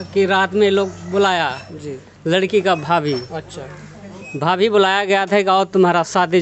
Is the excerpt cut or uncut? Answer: uncut